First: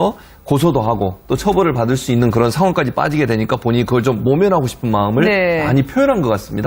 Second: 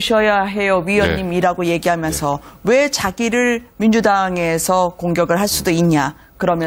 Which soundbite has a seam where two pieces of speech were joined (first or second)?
first